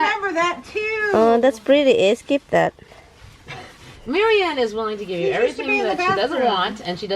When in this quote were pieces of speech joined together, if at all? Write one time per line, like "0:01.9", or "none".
none